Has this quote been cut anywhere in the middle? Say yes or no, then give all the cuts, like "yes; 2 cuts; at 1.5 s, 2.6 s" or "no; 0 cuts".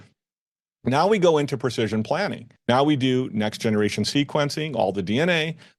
yes; 1 cut; at 2.5 s